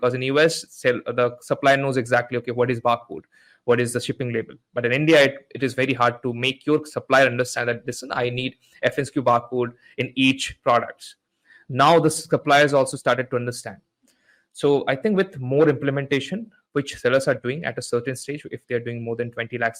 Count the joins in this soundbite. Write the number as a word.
zero